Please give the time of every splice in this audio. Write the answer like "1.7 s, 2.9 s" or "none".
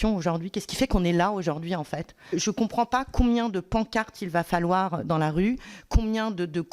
2.3 s